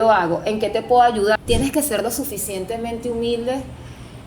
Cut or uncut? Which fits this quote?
cut